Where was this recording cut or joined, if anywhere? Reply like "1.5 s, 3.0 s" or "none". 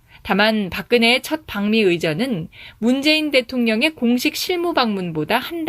1.5 s